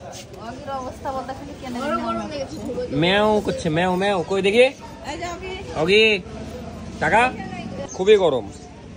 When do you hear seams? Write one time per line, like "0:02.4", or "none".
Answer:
none